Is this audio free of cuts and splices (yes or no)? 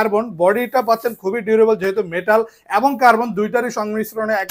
yes